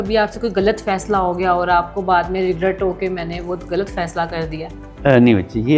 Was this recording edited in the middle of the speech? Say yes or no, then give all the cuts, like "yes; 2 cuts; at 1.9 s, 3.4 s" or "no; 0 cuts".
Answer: no; 0 cuts